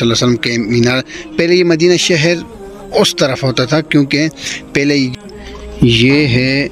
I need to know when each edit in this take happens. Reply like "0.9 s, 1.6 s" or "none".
5.1 s

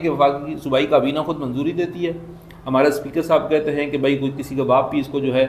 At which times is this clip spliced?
none

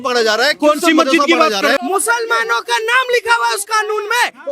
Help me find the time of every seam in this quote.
1.8 s

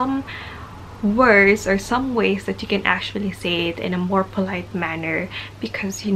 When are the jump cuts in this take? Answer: none

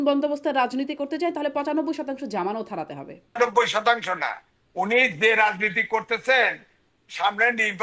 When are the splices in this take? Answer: 3.4 s

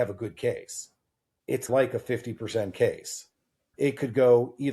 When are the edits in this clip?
1.6 s

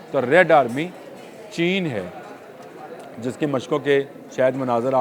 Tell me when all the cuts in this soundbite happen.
none

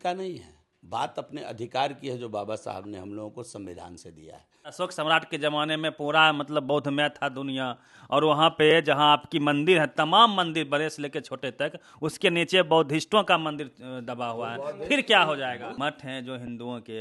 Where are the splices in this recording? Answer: 4.7 s, 15.8 s

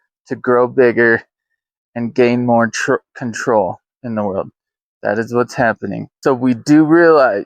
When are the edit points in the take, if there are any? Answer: 6.1 s

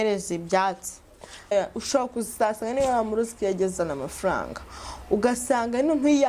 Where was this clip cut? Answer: 1.5 s

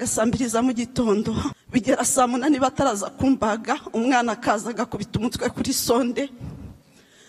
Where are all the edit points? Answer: 1.6 s

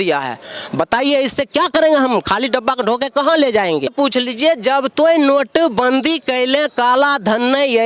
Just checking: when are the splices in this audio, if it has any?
3.9 s

